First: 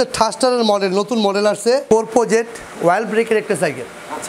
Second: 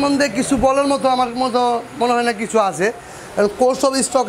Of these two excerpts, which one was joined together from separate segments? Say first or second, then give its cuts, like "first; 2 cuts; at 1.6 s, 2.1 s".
first; 1 cut; at 1.8 s